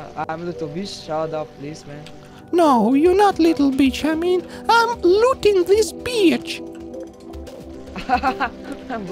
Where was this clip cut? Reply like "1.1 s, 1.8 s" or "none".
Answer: 6.4 s, 8.0 s